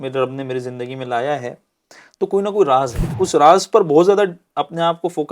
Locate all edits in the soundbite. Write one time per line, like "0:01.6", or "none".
0:03.0